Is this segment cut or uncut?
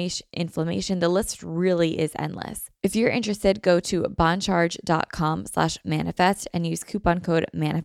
cut